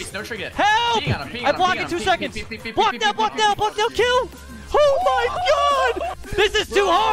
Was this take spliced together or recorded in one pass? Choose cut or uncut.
cut